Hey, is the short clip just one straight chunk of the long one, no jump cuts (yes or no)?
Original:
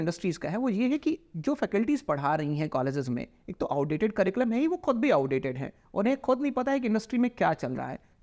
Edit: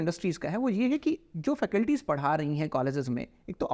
yes